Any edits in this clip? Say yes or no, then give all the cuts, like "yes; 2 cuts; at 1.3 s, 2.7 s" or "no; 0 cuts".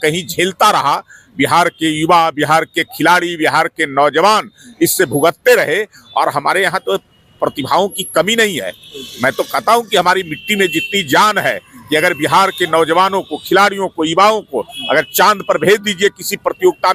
no; 0 cuts